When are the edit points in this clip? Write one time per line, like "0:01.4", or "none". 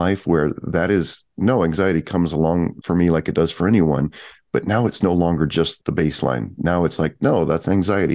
0:02.8